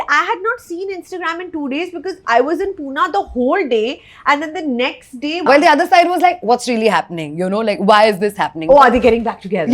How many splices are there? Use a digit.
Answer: 1